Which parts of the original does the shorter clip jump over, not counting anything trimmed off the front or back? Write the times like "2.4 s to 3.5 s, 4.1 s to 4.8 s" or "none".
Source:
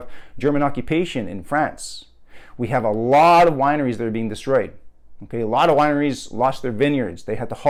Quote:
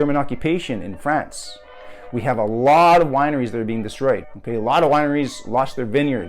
4.8 s to 5.2 s